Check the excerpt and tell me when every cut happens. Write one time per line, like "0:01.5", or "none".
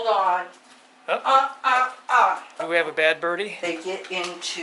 0:02.6
0:03.5